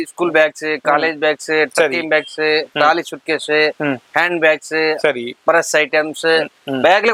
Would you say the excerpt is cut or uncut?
uncut